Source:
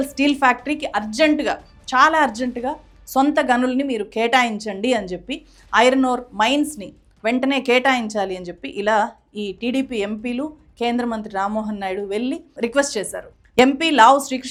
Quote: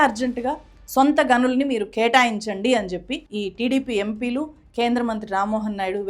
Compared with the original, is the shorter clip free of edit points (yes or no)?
no